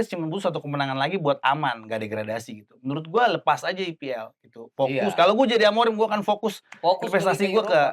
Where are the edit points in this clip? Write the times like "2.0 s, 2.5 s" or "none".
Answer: none